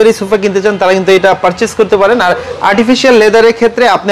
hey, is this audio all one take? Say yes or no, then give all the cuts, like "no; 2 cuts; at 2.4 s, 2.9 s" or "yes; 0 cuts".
yes; 0 cuts